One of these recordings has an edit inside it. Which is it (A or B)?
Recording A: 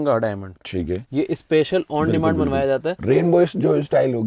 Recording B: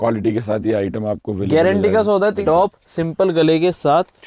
B